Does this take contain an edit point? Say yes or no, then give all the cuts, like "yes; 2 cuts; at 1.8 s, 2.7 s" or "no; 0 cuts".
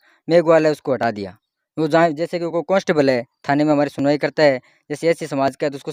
no; 0 cuts